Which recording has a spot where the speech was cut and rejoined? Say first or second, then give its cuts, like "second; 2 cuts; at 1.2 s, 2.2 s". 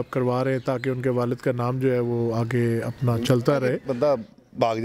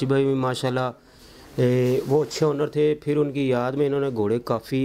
first; 1 cut; at 3.9 s